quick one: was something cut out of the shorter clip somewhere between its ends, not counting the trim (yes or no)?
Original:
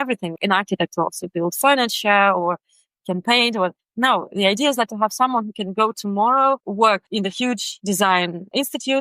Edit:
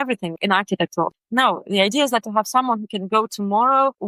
yes